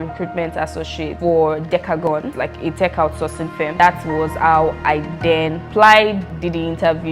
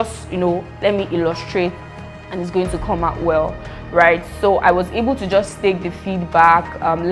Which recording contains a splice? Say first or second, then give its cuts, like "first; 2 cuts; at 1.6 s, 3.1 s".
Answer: first; 5 cuts; at 1.1 s, 2.3 s, 3.8 s, 5.6 s, 6.3 s